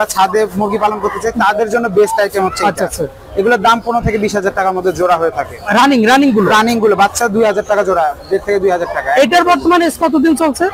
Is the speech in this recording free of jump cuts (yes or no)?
yes